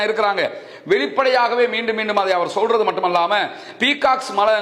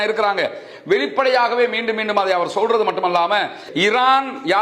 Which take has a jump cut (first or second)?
second